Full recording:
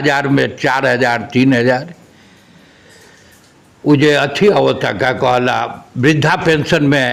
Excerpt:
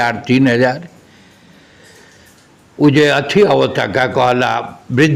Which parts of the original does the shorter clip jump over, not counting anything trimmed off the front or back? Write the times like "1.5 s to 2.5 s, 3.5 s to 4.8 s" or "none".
none